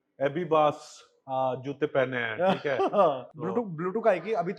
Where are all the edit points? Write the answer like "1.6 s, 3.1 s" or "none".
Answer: 3.3 s